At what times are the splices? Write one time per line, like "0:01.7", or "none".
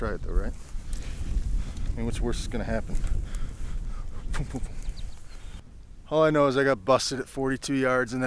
0:05.6